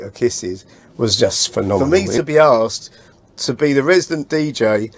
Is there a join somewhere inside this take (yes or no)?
yes